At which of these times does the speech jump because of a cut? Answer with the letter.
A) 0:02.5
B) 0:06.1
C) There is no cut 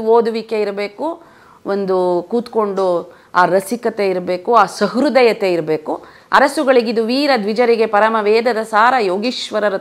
B